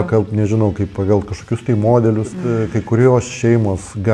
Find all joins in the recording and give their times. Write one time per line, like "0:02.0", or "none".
0:02.5